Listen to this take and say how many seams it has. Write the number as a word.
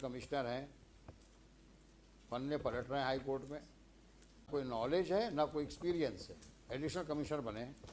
one